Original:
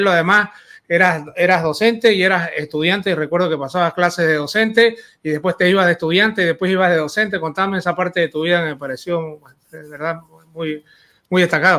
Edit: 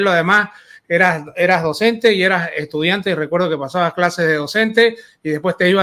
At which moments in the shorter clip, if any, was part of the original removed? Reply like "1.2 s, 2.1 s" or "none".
none